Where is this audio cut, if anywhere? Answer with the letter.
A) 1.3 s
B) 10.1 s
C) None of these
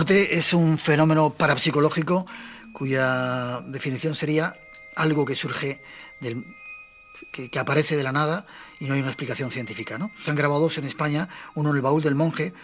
C